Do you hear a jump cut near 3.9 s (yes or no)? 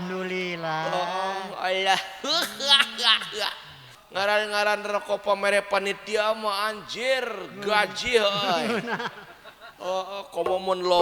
yes